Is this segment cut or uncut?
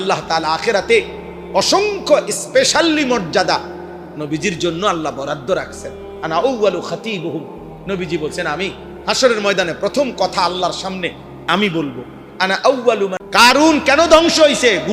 cut